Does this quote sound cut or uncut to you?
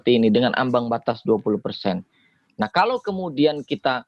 uncut